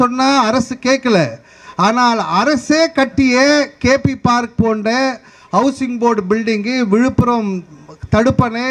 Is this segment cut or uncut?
uncut